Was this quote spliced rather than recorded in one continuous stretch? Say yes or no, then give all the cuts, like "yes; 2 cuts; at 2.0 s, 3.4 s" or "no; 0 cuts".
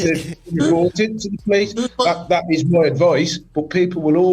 no; 0 cuts